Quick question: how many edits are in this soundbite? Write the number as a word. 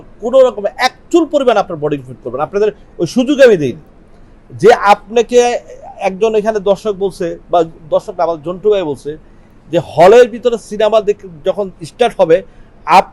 zero